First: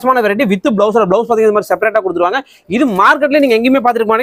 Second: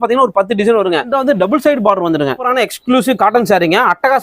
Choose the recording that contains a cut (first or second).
second